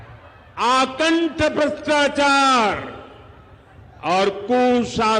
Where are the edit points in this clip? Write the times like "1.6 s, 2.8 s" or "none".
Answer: none